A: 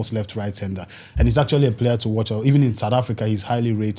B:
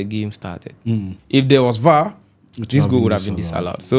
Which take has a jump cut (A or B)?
B